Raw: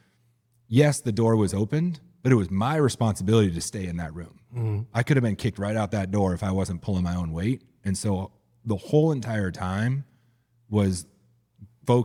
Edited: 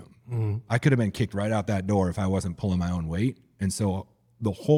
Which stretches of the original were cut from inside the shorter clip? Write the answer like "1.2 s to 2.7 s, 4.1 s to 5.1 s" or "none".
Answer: none